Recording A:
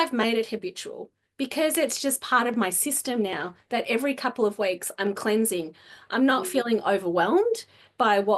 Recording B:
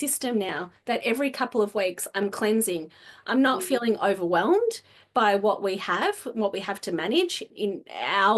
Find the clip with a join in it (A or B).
B